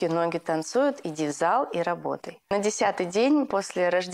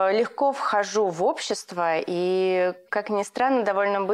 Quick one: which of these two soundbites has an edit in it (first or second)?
first